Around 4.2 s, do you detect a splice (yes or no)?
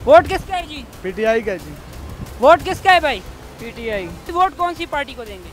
yes